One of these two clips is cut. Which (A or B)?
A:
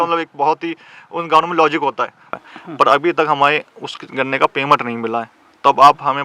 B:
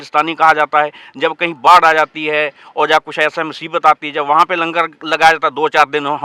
A